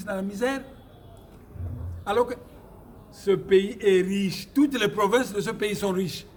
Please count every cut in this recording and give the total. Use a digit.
0